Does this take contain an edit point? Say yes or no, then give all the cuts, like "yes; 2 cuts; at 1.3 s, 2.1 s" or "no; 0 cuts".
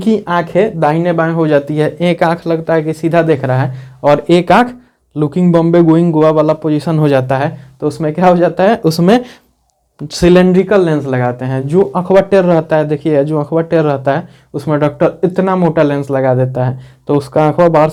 no; 0 cuts